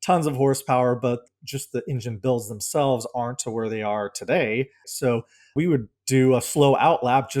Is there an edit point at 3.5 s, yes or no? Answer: no